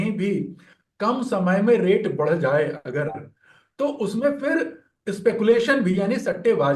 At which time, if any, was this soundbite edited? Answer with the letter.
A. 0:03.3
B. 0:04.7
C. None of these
C